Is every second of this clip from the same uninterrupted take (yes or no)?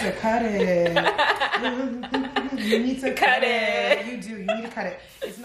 yes